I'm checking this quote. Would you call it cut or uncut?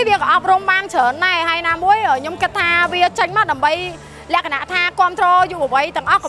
uncut